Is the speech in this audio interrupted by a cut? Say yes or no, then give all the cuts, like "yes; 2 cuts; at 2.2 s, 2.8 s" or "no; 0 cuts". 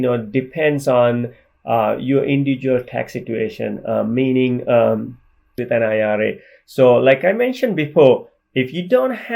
yes; 1 cut; at 5.6 s